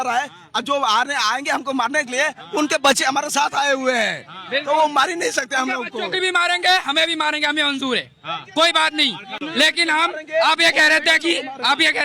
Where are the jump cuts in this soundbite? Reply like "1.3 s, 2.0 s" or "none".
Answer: none